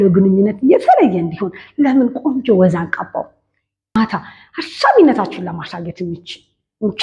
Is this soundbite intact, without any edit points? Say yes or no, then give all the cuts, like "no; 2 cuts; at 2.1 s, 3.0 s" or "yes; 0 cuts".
no; 1 cut; at 4.0 s